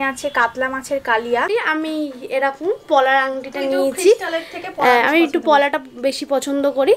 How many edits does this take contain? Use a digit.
1